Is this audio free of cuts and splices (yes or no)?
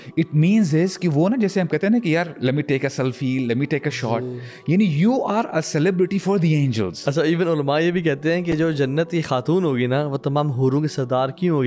yes